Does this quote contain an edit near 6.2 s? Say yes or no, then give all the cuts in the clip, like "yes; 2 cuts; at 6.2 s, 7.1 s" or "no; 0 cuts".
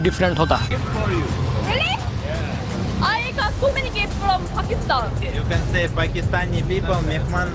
no; 0 cuts